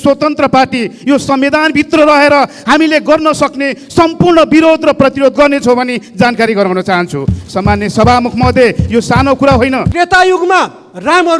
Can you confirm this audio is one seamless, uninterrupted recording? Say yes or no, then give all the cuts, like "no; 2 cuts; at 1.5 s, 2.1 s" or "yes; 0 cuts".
no; 1 cut; at 9.9 s